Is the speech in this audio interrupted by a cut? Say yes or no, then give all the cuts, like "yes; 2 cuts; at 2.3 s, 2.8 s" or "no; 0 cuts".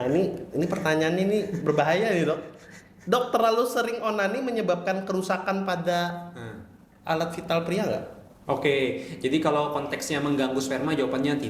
no; 0 cuts